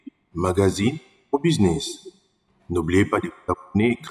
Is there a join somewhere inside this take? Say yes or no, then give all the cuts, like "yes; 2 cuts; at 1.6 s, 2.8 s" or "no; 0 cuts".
no; 0 cuts